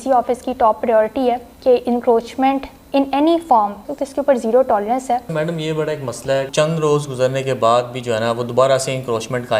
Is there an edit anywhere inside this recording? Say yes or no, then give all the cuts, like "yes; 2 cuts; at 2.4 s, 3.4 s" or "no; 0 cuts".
yes; 5 cuts; at 1.5 s, 2.7 s, 3.8 s, 5.3 s, 6.5 s